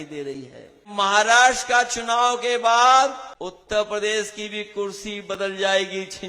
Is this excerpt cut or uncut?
cut